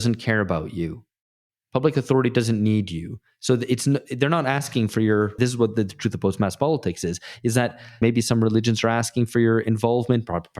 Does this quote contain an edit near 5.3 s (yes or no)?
yes